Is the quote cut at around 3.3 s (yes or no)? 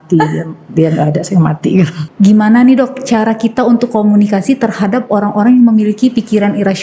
no